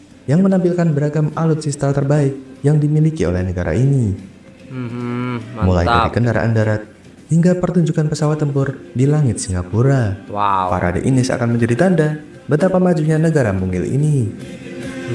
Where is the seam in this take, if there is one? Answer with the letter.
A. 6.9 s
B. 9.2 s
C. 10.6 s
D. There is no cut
D